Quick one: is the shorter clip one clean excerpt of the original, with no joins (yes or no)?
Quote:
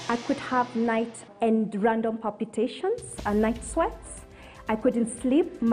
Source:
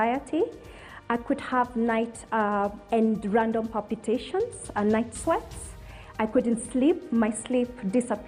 no